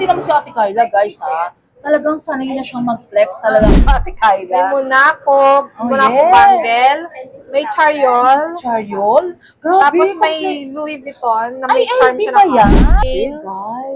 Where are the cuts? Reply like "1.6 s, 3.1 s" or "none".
4.0 s, 12.7 s

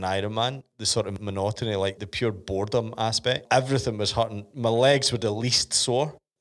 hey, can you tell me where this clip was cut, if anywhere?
0.8 s, 2.0 s, 3.4 s

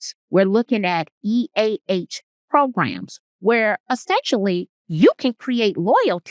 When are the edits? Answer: 4.8 s

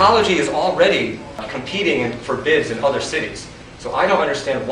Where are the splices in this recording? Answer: 1.5 s

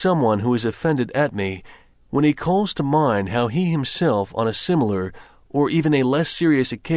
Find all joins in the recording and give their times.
3.9 s

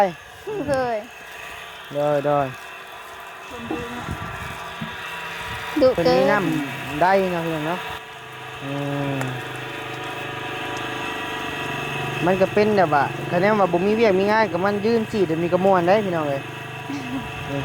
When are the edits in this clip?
6.3 s

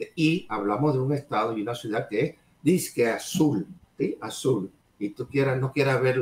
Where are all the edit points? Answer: 3.8 s, 4.8 s

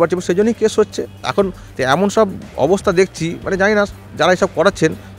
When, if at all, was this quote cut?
1.7 s

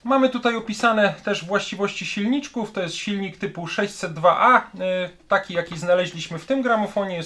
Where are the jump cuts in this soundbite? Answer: none

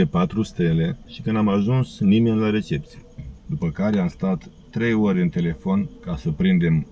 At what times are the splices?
1.0 s, 3.2 s

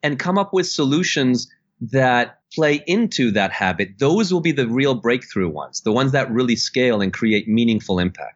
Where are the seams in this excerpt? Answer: 2.4 s

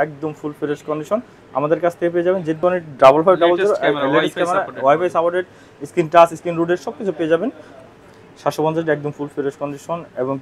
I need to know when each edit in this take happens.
2.5 s, 7.8 s

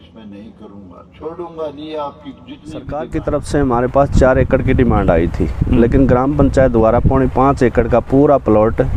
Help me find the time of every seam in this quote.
3.0 s

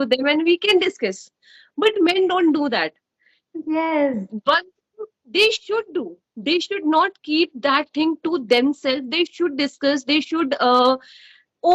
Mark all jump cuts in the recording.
none

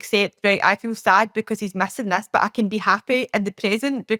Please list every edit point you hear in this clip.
none

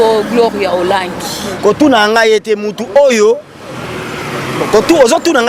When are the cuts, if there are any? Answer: none

